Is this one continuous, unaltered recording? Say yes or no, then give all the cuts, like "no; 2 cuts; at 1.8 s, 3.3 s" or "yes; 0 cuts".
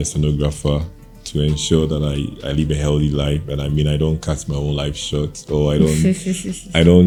yes; 0 cuts